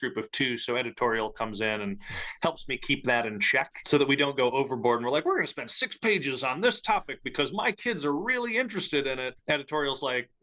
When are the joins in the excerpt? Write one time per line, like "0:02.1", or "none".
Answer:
0:03.8
0:09.4